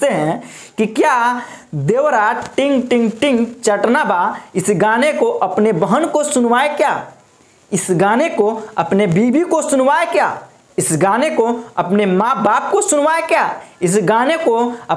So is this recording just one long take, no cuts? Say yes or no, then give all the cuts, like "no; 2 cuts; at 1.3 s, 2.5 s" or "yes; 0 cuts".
yes; 0 cuts